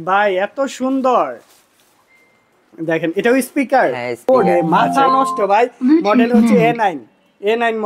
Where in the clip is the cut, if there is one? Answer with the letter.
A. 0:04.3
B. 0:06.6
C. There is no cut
A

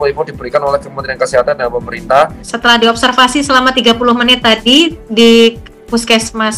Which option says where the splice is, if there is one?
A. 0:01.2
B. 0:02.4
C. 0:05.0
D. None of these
B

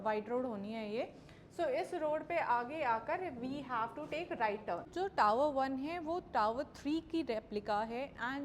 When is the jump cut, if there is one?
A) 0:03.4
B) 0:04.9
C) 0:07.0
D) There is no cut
B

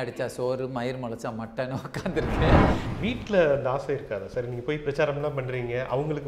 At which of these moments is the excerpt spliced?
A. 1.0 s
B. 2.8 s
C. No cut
B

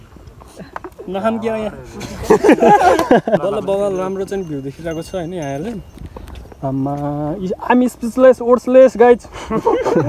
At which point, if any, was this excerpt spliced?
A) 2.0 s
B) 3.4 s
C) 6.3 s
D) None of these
B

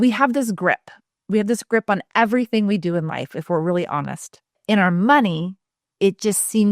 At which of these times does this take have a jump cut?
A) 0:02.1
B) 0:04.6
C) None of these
B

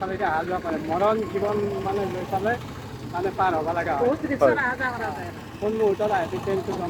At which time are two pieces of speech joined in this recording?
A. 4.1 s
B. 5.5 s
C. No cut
C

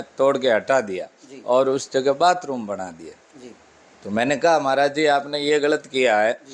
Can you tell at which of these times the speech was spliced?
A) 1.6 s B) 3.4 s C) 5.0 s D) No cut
D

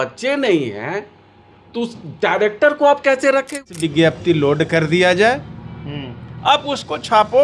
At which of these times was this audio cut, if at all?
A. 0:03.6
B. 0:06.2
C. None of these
A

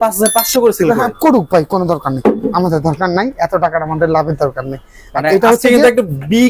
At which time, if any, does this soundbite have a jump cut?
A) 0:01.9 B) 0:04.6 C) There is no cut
C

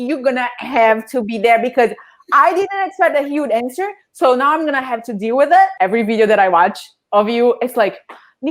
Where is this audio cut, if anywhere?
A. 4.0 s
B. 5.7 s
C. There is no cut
B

